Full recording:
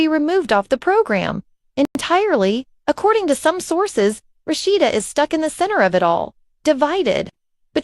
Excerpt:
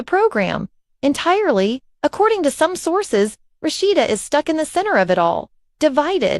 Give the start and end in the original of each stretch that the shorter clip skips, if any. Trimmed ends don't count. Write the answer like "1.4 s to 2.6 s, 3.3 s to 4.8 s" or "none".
1.9 s to 2.0 s